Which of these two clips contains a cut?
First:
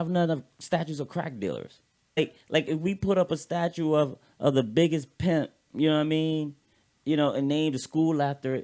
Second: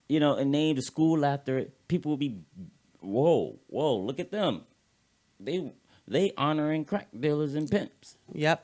first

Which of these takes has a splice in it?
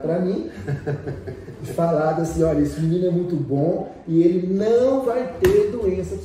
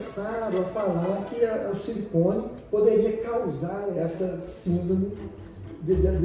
second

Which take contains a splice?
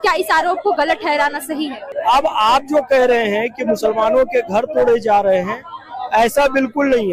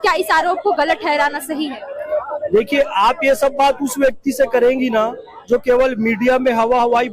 first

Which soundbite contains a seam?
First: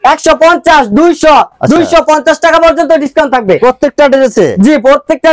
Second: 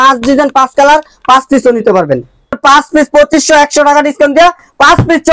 second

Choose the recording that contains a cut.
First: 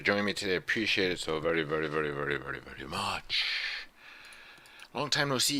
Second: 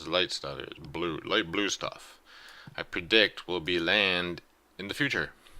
second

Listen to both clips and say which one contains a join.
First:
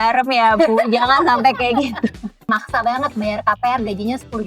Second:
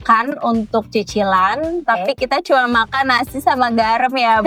first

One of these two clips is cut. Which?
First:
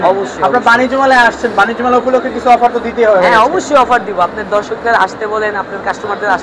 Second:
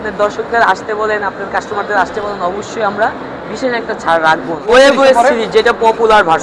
second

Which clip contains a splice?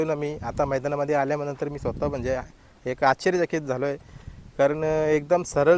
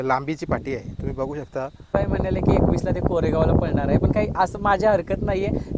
second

